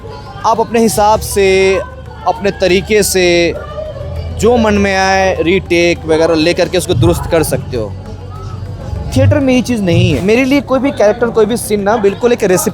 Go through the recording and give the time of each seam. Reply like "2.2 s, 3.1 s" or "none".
10.2 s